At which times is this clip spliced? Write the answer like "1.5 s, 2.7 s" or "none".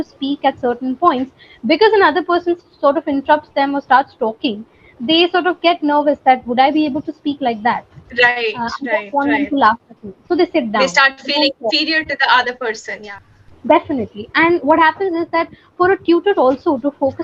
none

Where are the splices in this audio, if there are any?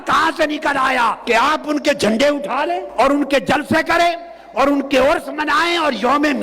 1.2 s, 2.9 s

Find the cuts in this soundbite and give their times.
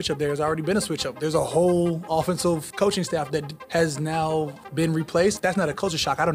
3.6 s, 4.6 s, 5.4 s

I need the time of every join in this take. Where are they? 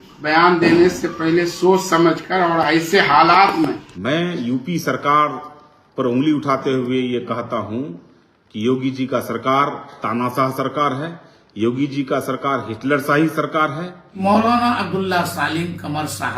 3.9 s, 14.2 s

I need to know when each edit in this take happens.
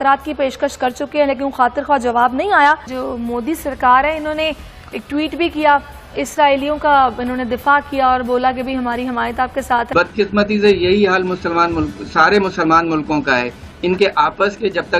2.9 s, 9.9 s

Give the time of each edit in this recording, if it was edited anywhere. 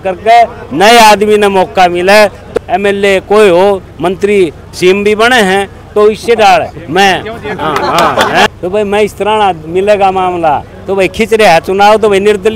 2.4 s, 8.5 s

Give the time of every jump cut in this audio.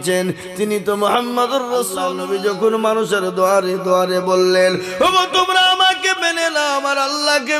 2.0 s

